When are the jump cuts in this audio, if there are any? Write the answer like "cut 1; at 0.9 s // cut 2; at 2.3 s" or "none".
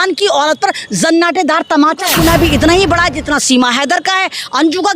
cut 1; at 2.1 s